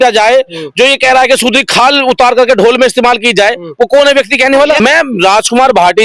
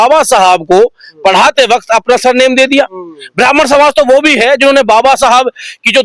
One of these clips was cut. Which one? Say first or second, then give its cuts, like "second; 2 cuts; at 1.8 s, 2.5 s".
first; 1 cut; at 4.8 s